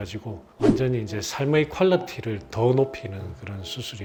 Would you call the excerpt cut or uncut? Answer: uncut